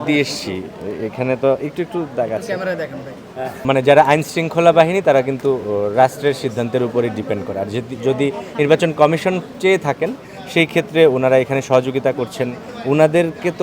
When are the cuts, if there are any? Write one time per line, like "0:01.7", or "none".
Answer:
0:03.6

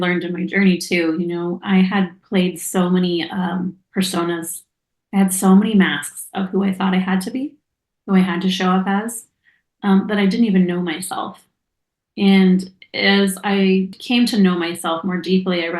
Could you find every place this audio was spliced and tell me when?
0:14.0

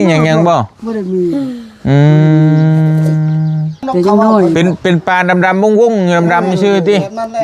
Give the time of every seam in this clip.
0:03.8

